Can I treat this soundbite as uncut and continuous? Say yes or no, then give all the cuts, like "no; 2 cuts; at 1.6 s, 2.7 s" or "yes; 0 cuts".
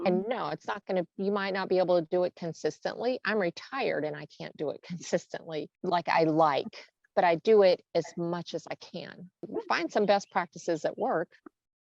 no; 2 cuts; at 5.7 s, 9.5 s